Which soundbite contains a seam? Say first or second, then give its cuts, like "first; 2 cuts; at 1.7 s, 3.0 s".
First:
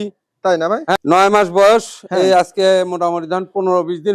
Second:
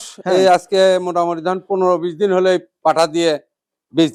first; 1 cut; at 0.9 s